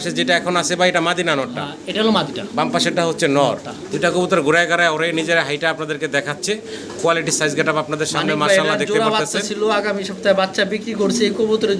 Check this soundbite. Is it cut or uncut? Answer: uncut